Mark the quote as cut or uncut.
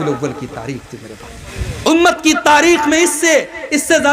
cut